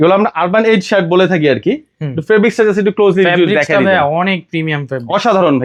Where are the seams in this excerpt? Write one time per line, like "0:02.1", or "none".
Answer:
none